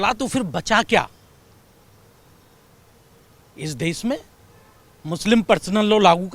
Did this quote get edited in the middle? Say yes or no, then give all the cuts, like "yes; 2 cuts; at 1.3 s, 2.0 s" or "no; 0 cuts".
no; 0 cuts